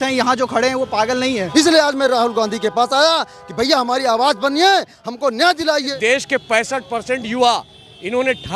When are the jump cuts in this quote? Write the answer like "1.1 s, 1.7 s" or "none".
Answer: 1.5 s, 5.9 s